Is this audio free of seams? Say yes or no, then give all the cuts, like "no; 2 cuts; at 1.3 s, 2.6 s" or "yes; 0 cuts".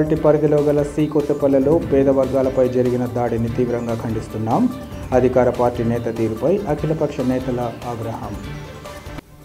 yes; 0 cuts